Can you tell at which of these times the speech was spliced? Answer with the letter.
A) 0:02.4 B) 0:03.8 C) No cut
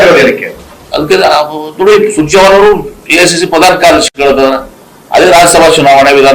B